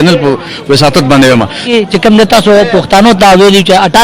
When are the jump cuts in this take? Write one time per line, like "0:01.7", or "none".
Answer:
0:01.7